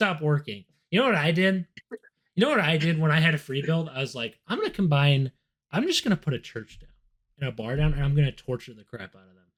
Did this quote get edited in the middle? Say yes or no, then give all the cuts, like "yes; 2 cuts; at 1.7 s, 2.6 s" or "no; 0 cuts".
no; 0 cuts